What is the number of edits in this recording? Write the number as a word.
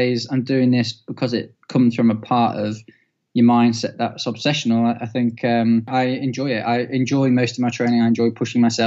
one